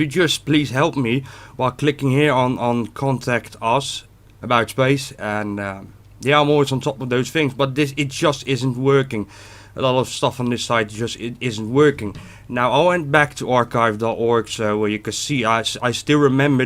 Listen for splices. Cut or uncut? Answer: uncut